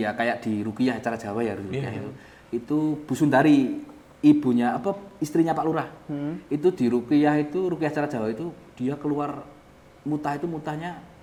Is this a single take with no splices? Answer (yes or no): yes